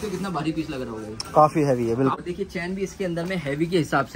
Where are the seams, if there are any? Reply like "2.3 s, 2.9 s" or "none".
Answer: 2.1 s